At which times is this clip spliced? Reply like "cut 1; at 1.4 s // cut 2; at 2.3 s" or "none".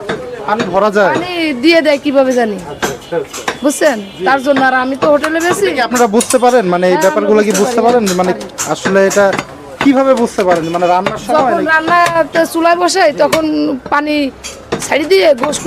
none